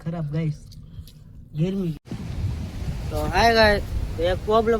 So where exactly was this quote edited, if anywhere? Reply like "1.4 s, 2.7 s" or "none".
2.0 s